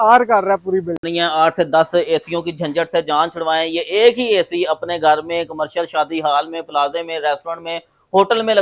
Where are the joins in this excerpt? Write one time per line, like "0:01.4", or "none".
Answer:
0:01.0